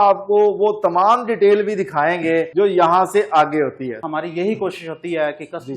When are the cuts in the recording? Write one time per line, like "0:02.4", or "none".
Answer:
0:02.5
0:04.0